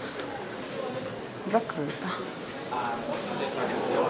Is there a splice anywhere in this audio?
no; 0 cuts

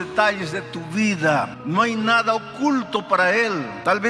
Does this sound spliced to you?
yes; 1 cut; at 1.6 s

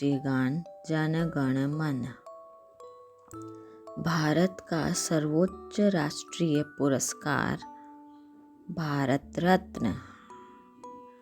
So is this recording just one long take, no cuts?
no; 2 cuts; at 2.2 s, 3.6 s

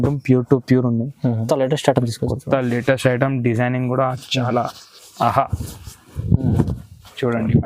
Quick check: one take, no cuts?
no; 1 cut; at 1.4 s

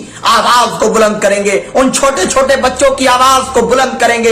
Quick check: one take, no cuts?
yes; 0 cuts

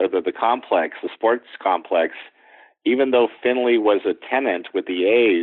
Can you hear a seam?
no; 0 cuts

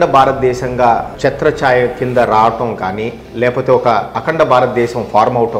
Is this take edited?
yes; 1 cut; at 1.1 s

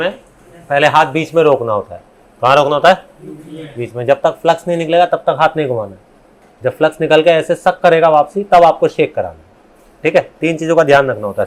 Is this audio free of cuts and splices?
yes; 0 cuts

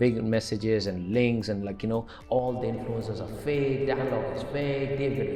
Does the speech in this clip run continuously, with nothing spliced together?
yes; 0 cuts

